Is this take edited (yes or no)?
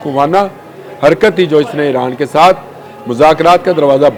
no